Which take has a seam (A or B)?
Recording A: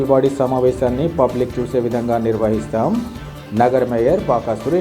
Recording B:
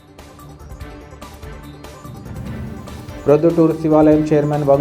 B